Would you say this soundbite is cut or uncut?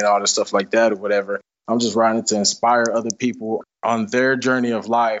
uncut